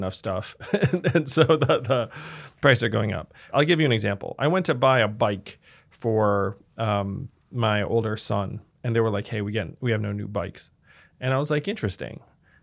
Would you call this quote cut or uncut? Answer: cut